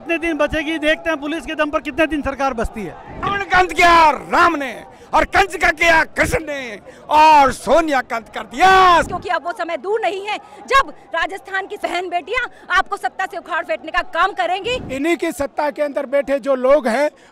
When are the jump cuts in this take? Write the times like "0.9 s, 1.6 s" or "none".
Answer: 3.3 s, 9.1 s, 11.8 s, 14.9 s